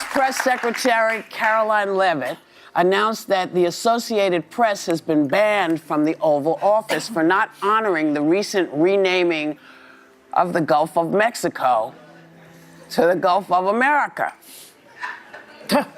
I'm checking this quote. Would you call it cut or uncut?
uncut